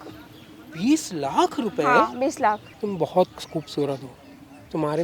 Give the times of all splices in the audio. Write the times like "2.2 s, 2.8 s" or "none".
2.7 s